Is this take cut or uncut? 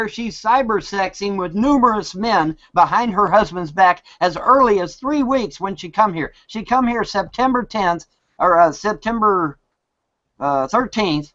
uncut